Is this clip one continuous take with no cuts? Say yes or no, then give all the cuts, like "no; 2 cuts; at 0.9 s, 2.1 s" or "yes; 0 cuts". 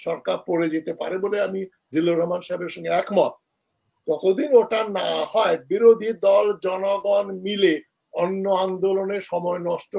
yes; 0 cuts